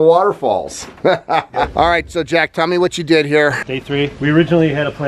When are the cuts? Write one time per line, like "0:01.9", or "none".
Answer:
none